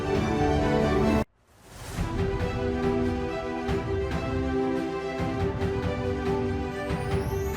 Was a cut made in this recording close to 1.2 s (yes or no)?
yes